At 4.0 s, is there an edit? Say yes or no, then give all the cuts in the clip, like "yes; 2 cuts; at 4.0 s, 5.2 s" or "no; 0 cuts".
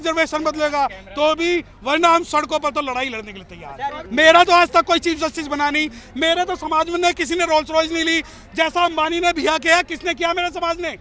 yes; 1 cut; at 4.0 s